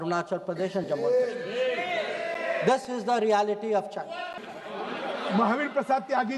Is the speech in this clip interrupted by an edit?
yes; 1 cut; at 4.4 s

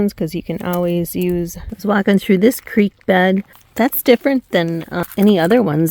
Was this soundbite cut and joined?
yes; 3 cuts; at 1.6 s, 3.6 s, 5.0 s

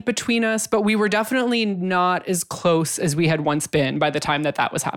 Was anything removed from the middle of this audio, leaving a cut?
no; 0 cuts

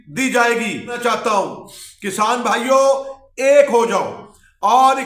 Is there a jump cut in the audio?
yes; 1 cut; at 1.0 s

